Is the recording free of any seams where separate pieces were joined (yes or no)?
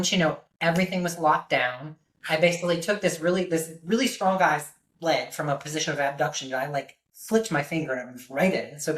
yes